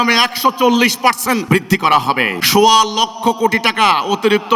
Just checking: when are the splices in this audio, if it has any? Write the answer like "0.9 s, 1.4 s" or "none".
1.4 s, 2.4 s